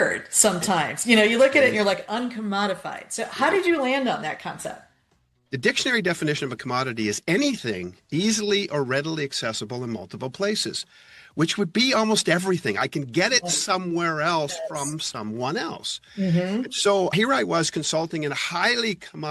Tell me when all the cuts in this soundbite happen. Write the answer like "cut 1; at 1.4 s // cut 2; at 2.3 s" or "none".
cut 1; at 2.0 s // cut 2; at 5.4 s